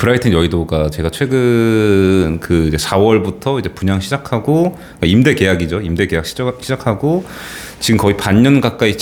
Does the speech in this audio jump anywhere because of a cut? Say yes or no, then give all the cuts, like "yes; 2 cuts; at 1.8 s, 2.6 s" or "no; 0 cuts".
no; 0 cuts